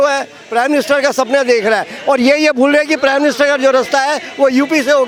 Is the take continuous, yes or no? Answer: yes